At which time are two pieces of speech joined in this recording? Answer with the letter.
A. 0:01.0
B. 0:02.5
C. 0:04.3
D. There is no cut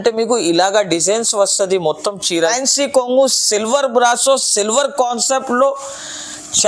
B